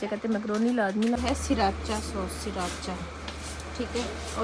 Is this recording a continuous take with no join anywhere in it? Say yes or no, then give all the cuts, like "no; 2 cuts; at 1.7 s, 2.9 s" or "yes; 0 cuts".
no; 1 cut; at 1.2 s